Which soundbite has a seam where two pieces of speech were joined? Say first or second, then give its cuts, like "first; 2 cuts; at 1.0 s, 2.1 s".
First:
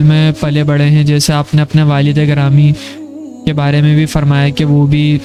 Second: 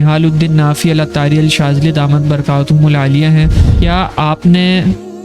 second; 1 cut; at 3.6 s